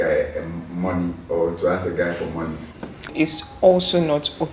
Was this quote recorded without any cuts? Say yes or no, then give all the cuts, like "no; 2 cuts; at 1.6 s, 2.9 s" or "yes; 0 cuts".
no; 1 cut; at 3.1 s